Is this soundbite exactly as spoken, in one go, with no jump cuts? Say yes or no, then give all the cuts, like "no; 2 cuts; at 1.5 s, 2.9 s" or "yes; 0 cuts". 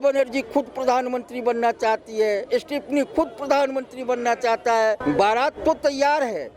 no; 1 cut; at 5.0 s